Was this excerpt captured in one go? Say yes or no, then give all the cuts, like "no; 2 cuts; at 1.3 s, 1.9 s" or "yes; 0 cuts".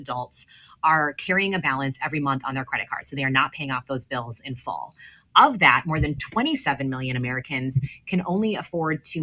yes; 0 cuts